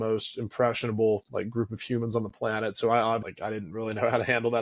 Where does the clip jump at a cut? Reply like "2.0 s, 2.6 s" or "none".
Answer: 3.3 s